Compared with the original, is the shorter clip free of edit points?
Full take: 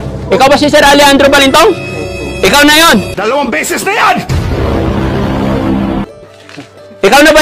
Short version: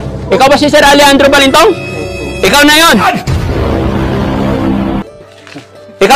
no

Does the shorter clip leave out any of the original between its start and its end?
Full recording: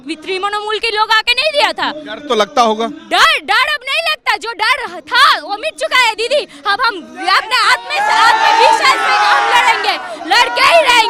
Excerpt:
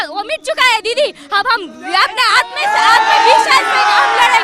no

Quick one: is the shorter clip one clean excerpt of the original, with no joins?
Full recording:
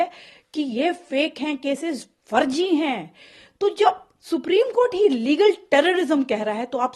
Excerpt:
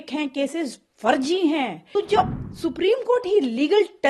no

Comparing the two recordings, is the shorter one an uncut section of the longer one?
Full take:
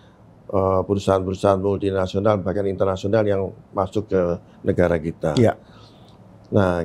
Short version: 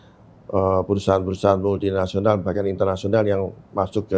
yes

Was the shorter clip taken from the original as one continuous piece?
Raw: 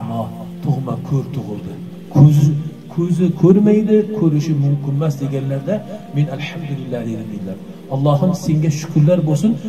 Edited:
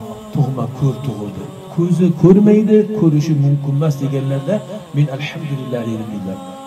no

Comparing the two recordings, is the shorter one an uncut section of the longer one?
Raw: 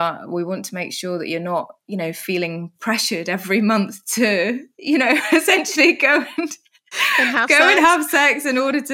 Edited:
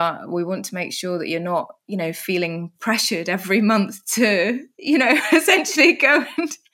yes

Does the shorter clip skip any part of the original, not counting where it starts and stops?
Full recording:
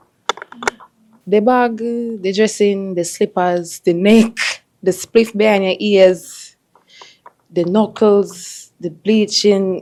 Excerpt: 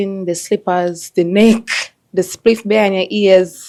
no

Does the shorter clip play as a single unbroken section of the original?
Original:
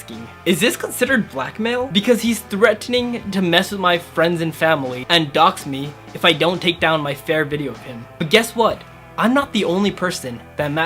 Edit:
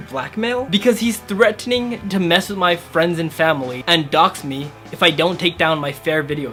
yes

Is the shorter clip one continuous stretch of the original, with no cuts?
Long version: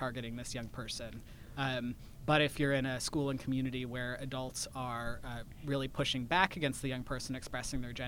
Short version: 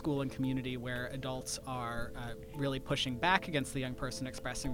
yes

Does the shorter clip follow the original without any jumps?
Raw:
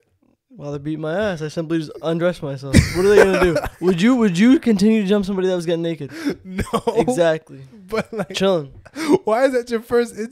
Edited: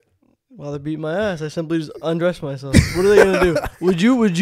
yes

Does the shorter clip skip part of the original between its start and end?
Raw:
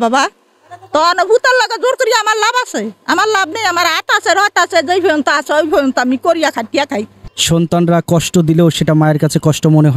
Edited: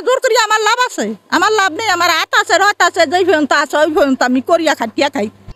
no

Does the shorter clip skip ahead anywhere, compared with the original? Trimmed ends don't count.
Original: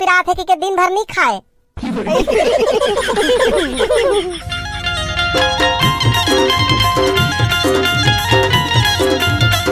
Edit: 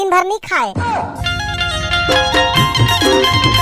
yes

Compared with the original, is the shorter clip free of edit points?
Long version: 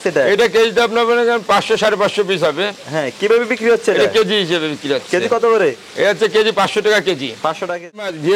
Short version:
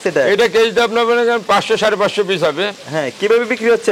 yes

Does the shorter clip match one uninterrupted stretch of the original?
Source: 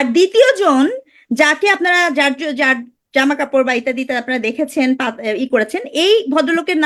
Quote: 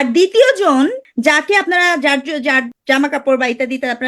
no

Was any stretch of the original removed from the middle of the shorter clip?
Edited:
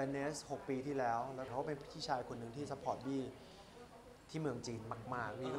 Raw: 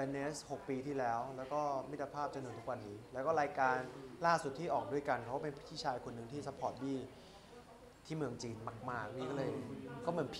yes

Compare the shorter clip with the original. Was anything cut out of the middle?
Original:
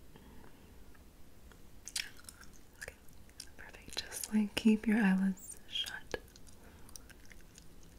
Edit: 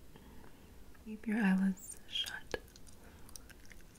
yes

